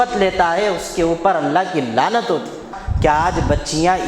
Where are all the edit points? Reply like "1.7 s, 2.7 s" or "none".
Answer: 2.8 s